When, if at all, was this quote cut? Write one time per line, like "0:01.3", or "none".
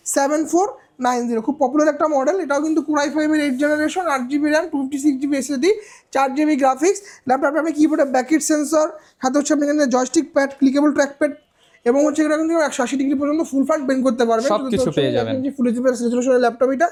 none